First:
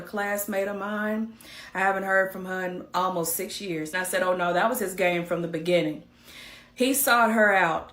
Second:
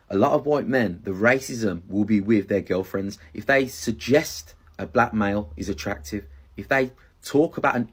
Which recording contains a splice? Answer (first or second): first